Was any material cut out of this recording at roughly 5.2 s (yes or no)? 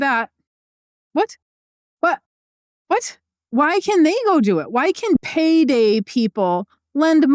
yes